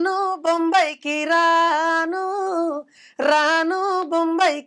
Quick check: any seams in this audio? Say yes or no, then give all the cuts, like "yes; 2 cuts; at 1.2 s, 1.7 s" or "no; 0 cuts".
no; 0 cuts